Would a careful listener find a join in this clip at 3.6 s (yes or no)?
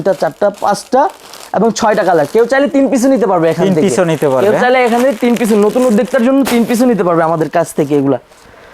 no